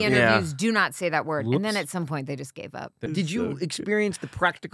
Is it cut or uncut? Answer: cut